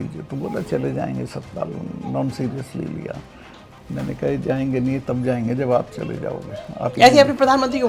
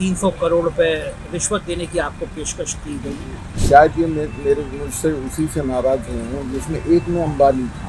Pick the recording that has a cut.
second; 1 cut; at 3.6 s

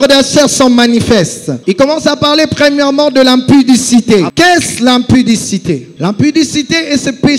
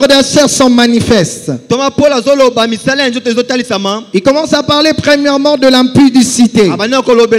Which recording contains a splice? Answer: first; 3 cuts; at 1.6 s, 4.3 s, 5.9 s

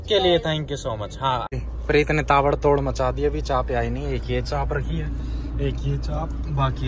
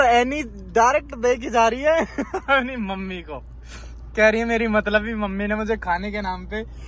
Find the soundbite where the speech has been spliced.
first; 1 cut; at 1.6 s

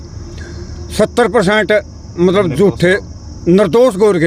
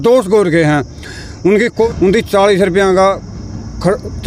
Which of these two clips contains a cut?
second; 1 cut; at 1.9 s

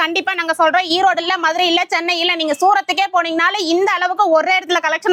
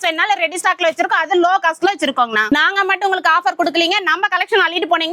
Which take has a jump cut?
second; 1 cut; at 2.7 s

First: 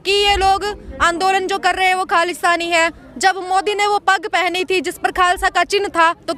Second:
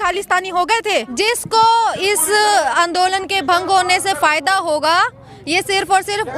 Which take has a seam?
second; 1 cut; at 1.1 s

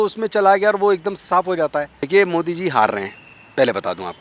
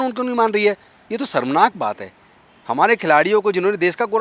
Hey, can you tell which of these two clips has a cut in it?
first; 1 cut; at 2.0 s

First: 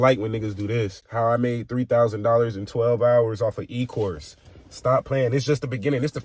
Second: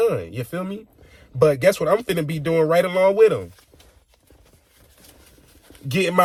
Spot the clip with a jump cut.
first; 1 cut; at 1.0 s

